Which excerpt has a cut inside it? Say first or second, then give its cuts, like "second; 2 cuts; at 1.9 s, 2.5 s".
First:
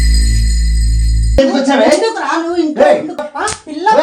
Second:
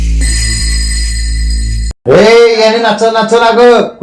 first; 1 cut; at 1.3 s